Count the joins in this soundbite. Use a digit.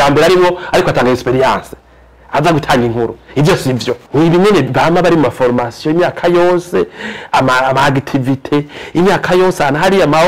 0